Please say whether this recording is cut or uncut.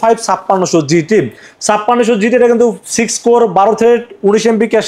uncut